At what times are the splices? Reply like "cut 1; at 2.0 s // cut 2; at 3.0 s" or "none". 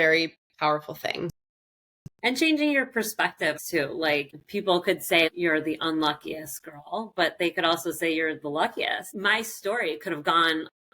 cut 1; at 2.0 s // cut 2; at 3.6 s // cut 3; at 9.1 s